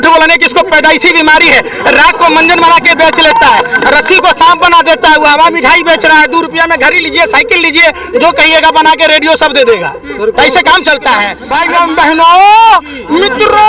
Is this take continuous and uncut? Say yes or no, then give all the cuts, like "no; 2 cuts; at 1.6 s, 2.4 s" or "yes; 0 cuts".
no; 1 cut; at 11.4 s